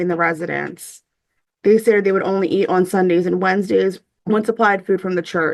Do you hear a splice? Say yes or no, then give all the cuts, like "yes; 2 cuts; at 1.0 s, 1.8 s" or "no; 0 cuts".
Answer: yes; 1 cut; at 4.1 s